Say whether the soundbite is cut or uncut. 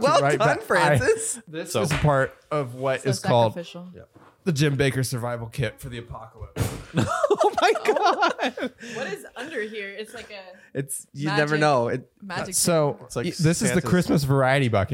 cut